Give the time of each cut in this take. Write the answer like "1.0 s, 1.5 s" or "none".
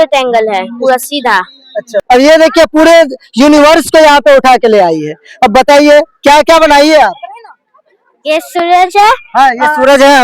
2.0 s